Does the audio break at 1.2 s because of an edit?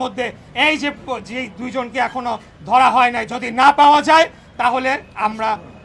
no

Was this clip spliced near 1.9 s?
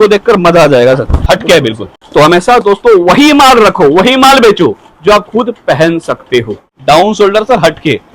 yes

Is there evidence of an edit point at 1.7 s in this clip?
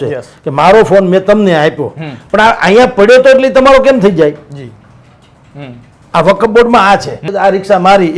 no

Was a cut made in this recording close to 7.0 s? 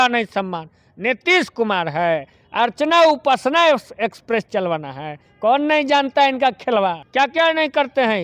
yes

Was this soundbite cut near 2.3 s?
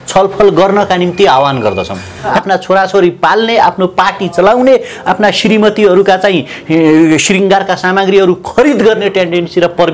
yes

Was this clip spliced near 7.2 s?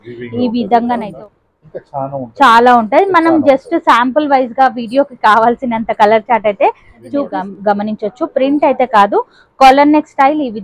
yes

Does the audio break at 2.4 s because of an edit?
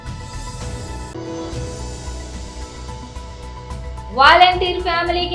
no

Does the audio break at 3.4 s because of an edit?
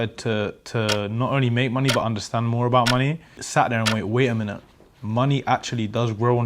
yes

